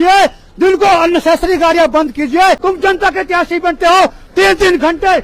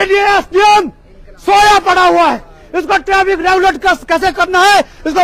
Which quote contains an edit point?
first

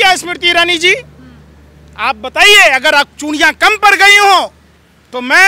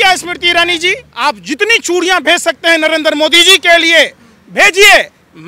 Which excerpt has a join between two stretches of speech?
second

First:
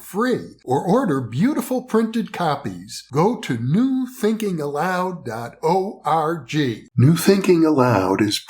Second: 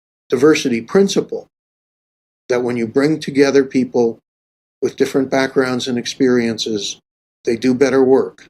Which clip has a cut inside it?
first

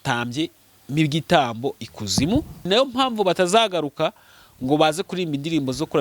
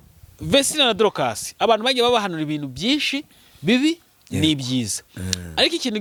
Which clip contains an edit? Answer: first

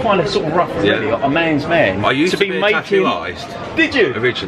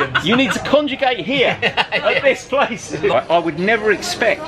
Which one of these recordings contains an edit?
second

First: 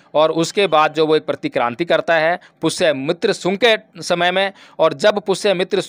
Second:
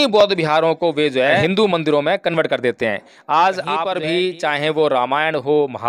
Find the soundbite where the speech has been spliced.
second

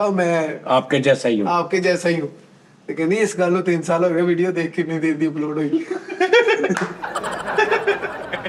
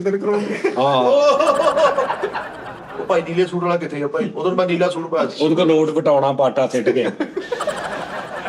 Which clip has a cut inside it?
second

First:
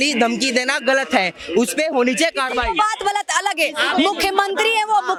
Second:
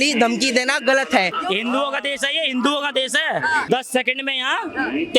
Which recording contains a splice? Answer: second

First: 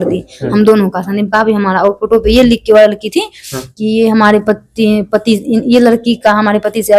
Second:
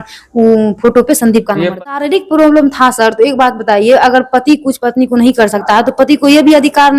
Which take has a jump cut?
second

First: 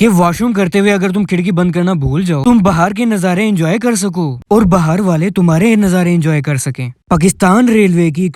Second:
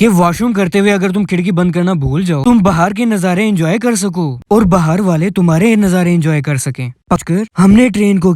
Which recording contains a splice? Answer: second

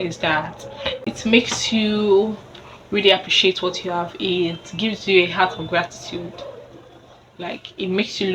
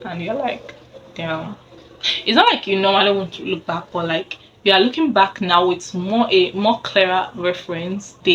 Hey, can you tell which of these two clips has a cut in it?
first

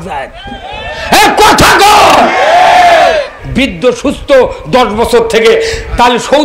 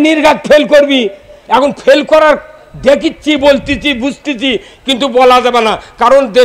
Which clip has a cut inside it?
first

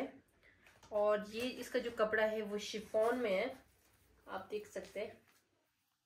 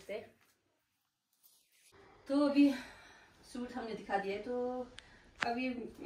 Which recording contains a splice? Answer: second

